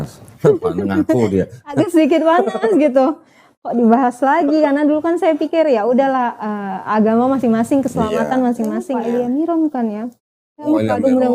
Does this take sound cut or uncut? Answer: cut